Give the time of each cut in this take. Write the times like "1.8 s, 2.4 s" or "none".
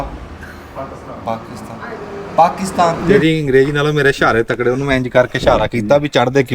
3.0 s